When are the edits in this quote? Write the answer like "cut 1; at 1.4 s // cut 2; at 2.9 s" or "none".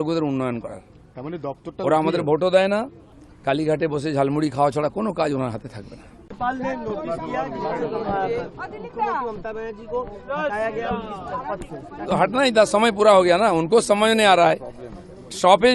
cut 1; at 3.0 s // cut 2; at 6.2 s